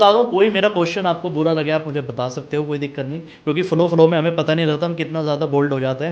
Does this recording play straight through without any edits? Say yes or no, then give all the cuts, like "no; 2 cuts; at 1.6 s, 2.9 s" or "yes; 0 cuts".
yes; 0 cuts